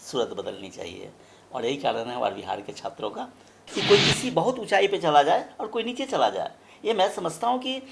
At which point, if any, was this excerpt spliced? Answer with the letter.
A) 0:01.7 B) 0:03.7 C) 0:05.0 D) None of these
B